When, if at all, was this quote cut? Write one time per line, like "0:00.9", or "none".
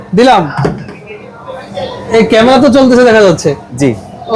none